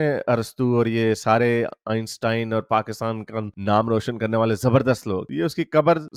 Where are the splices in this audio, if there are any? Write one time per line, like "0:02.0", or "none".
none